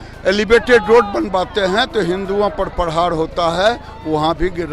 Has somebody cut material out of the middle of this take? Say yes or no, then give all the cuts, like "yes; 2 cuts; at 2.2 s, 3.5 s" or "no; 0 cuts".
no; 0 cuts